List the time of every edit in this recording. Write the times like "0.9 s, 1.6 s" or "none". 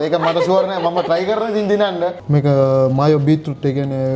2.2 s